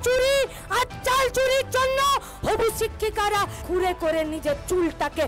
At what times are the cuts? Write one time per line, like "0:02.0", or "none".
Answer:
0:03.6